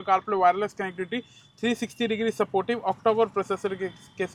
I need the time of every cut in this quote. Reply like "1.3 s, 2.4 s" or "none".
none